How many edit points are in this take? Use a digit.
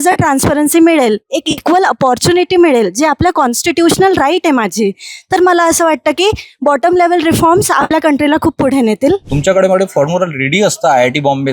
1